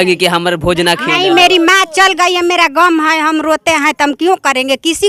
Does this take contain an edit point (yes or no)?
no